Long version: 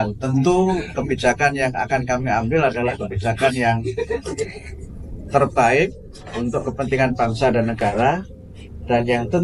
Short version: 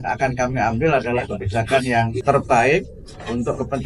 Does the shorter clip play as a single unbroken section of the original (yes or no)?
no